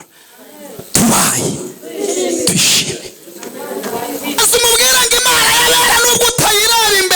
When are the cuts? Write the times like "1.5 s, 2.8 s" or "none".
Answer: 4.4 s